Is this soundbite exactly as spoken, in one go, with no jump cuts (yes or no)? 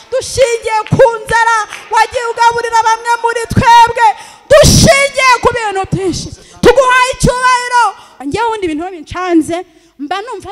no